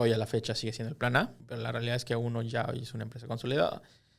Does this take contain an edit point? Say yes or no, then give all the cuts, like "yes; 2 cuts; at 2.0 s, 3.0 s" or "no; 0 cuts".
yes; 1 cut; at 1.4 s